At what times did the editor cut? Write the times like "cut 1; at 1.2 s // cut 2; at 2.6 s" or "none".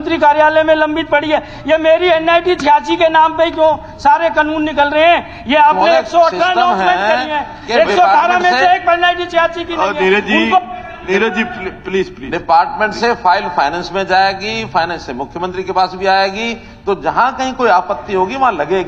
none